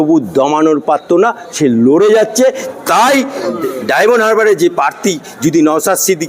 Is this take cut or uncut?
cut